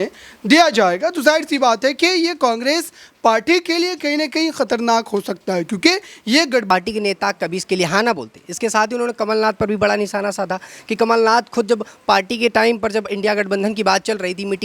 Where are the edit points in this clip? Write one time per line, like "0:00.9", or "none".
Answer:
0:06.7